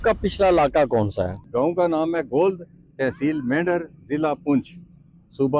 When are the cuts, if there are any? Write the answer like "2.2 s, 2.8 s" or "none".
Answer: 1.4 s